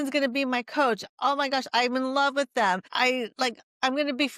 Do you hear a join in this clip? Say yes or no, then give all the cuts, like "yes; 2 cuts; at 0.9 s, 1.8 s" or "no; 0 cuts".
yes; 1 cut; at 2.9 s